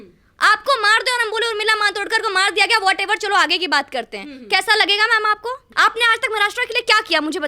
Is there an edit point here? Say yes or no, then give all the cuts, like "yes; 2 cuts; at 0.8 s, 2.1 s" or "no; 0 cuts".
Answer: yes; 1 cut; at 5.7 s